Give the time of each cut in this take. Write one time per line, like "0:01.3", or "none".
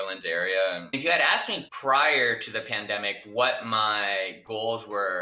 0:01.1